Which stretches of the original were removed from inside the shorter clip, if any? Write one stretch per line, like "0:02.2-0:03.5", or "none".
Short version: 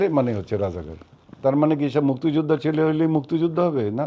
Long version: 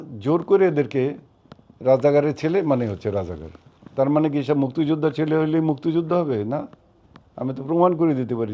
none